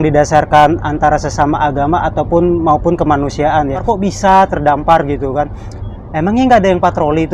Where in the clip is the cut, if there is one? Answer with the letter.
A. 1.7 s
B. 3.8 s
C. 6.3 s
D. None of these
B